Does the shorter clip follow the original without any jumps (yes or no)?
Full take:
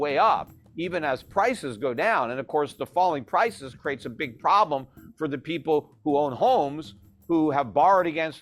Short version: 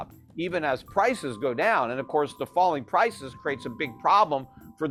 yes